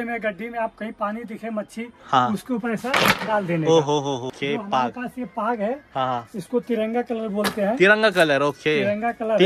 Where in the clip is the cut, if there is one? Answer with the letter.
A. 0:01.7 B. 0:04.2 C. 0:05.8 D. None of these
B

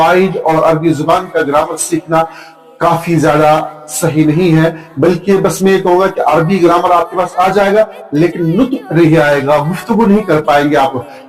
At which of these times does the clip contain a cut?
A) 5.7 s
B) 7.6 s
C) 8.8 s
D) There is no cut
D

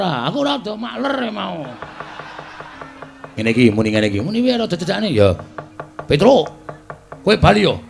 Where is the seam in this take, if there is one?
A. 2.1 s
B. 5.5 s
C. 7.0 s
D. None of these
D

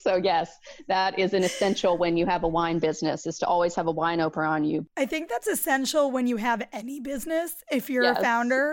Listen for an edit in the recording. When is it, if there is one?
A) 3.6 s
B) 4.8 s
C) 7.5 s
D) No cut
B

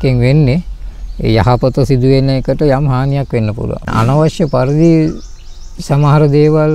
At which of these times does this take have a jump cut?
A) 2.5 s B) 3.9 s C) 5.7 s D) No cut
B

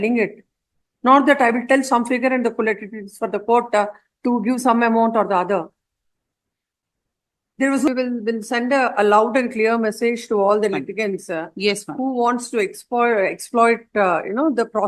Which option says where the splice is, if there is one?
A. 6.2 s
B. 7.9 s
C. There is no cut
B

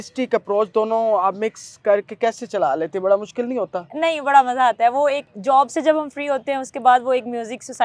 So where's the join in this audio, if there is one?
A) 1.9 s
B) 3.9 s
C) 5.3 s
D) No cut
D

